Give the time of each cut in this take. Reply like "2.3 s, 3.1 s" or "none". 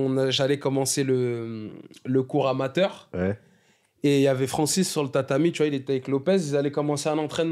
none